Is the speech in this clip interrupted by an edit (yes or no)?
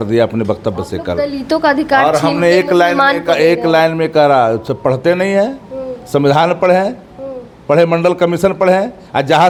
no